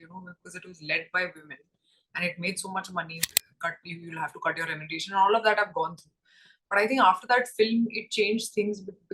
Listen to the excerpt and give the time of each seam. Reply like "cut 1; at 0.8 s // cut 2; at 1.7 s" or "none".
cut 1; at 3.2 s